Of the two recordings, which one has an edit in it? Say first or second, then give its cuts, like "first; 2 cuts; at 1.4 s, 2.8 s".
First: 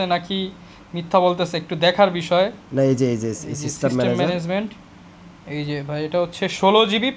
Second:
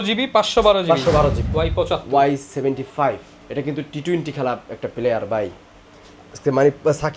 second; 1 cut; at 1.4 s